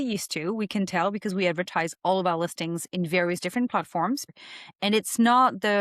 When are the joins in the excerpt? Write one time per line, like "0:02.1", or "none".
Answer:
0:04.3